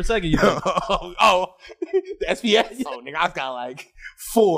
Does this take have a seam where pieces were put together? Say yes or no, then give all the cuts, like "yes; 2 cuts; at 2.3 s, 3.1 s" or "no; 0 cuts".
yes; 1 cut; at 2.9 s